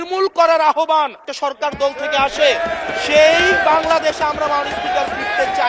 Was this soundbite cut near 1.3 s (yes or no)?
yes